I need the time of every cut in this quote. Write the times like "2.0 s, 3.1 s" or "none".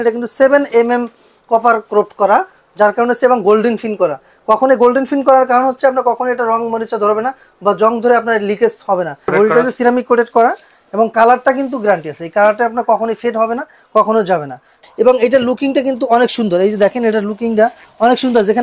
9.3 s, 14.8 s